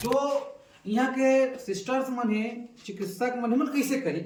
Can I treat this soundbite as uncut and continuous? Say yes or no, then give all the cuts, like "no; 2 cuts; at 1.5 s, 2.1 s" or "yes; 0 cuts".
yes; 0 cuts